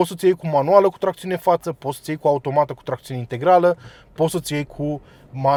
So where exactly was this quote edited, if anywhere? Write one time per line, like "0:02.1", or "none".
none